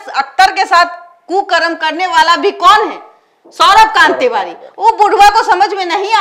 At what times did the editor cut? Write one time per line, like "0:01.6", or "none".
none

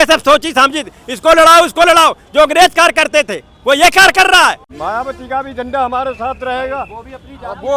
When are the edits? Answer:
0:04.7

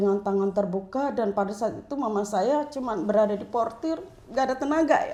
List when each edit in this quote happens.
none

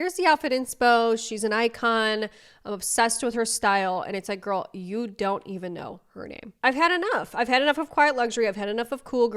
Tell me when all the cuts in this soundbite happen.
0:06.6

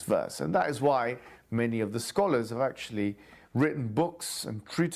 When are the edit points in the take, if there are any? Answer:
0:01.1

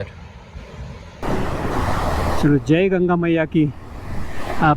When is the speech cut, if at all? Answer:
0:01.2

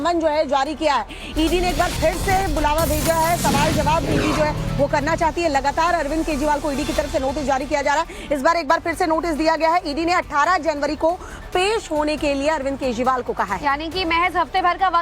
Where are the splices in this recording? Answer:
0:12.6

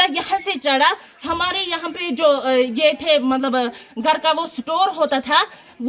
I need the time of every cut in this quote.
none

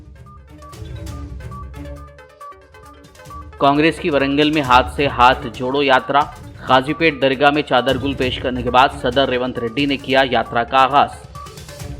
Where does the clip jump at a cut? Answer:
none

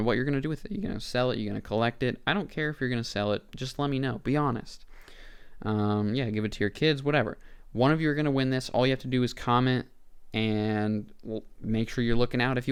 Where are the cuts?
none

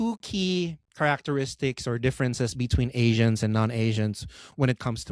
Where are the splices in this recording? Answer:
none

